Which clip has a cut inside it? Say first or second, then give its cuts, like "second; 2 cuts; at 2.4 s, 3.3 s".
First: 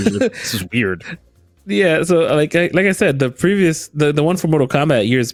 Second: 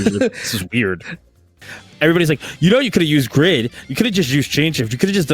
second; 1 cut; at 1.6 s